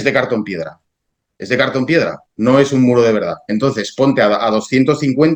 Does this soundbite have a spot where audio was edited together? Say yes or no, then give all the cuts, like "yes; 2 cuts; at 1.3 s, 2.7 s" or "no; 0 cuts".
no; 0 cuts